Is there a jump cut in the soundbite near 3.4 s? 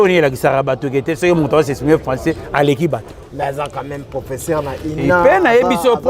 no; 0 cuts

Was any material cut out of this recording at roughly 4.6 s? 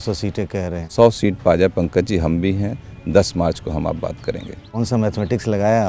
yes; 1 cut; at 4.6 s

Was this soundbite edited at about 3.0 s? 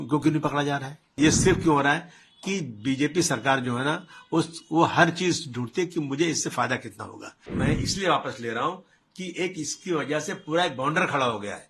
no; 2 cuts; at 1.2 s, 7.4 s

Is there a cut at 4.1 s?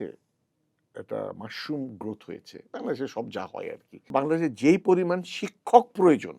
yes; 1 cut; at 4.1 s

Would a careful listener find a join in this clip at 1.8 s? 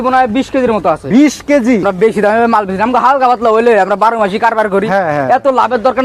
yes; 1 cut; at 1.8 s

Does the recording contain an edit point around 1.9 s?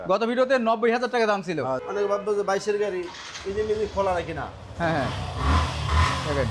yes; 1 cut; at 1.9 s

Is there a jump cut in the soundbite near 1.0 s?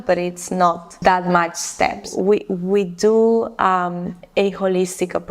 yes; 2 cuts; at 1.0 s, 2.1 s

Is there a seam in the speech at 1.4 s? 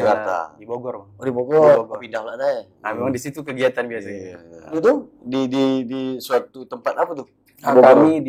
no; 1 cut; at 4.8 s

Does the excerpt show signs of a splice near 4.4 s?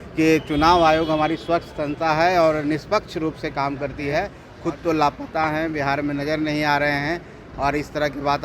yes; 1 cut; at 4.4 s

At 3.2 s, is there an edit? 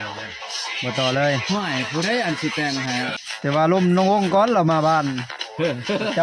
yes; 1 cut; at 3.2 s

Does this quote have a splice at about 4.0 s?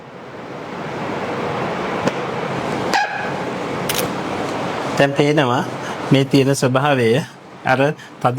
yes; 1 cut; at 4.0 s

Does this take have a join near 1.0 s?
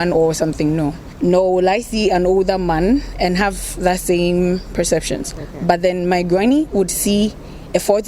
yes; 1 cut; at 1.0 s

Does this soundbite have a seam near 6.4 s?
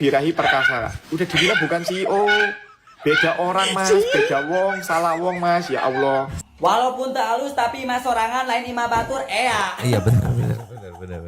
yes; 1 cut; at 6.4 s

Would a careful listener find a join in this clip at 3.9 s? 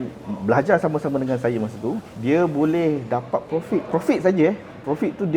yes; 2 cuts; at 2.1 s, 3.9 s

